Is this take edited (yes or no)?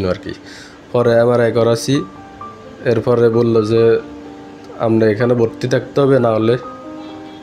no